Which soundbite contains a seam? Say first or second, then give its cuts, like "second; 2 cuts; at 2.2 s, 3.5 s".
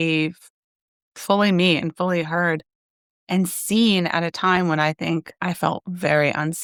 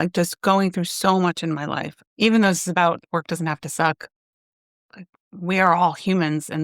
second; 2 cuts; at 1.9 s, 3.0 s